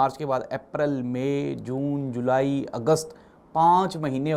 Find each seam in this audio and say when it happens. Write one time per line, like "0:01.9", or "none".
none